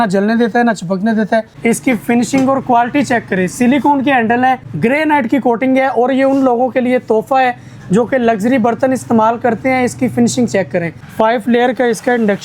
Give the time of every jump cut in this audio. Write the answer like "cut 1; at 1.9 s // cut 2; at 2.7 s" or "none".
cut 1; at 1.5 s // cut 2; at 4.7 s // cut 3; at 11.0 s

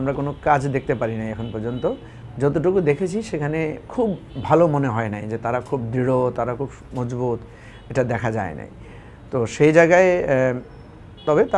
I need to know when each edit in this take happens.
none

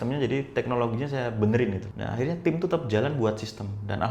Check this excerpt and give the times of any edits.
cut 1; at 1.9 s

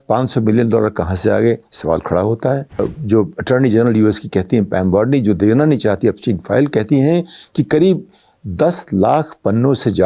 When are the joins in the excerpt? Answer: cut 1; at 2.8 s

